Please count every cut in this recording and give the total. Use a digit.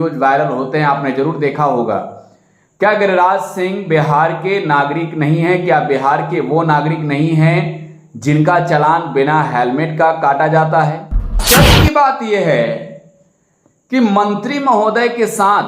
1